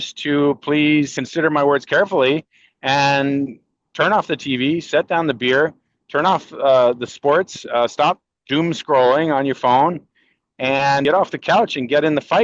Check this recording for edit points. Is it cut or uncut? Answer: cut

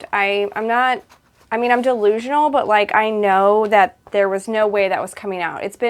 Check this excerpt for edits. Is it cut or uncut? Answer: uncut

